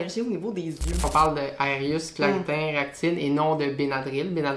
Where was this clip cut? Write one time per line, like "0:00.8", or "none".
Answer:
0:01.1